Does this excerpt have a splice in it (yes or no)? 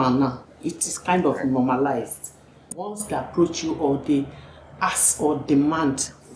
yes